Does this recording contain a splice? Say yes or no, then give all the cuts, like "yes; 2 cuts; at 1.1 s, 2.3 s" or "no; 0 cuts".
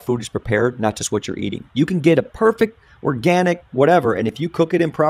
no; 0 cuts